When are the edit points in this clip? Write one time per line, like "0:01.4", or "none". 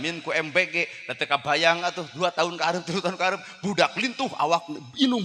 none